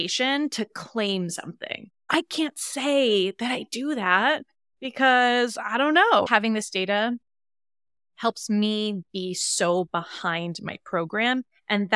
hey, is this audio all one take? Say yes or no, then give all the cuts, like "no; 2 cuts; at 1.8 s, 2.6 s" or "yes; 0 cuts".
no; 1 cut; at 6.3 s